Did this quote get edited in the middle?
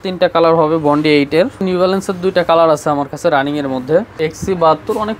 yes; 2 cuts; at 1.6 s, 4.1 s

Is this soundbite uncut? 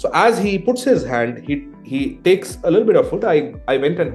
yes; 0 cuts

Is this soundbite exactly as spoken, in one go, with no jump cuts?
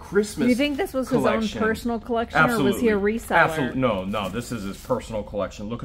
yes; 0 cuts

